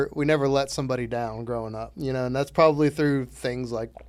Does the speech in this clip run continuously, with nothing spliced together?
yes; 0 cuts

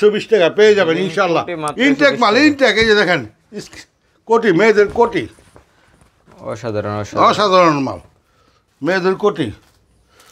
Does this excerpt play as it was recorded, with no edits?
yes; 0 cuts

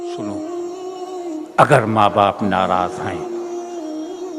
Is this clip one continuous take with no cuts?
no; 1 cut; at 0.9 s

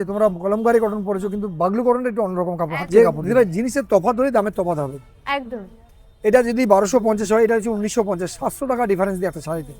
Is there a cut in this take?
yes; 1 cut; at 2.8 s

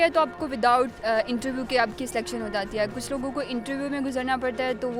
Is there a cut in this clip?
no; 0 cuts

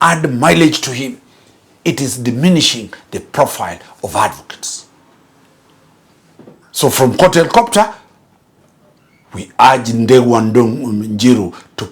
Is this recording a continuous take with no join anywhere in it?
yes; 0 cuts

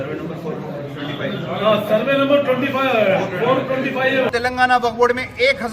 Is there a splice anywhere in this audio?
yes; 1 cut; at 4.3 s

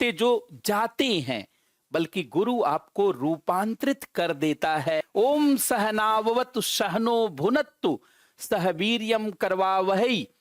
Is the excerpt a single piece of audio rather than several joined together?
no; 1 cut; at 5.0 s

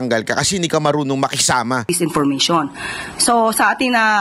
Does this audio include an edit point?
yes; 1 cut; at 1.9 s

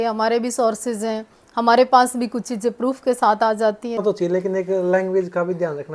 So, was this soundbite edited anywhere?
yes; 1 cut; at 4.0 s

